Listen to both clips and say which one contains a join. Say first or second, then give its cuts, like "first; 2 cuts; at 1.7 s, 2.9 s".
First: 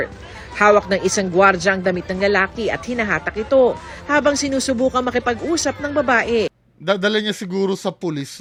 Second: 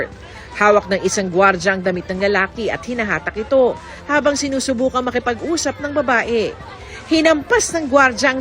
second; 1 cut; at 6.7 s